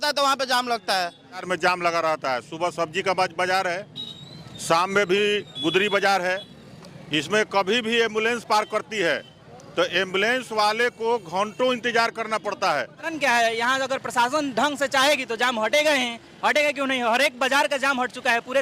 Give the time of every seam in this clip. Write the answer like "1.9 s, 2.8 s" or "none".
1.4 s, 13.1 s

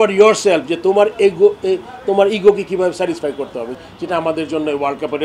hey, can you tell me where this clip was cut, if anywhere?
3.7 s

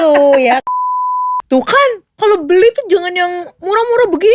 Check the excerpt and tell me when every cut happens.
1.0 s

